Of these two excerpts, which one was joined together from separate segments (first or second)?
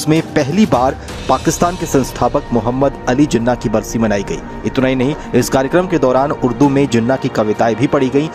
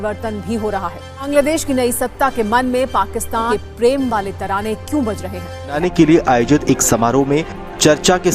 second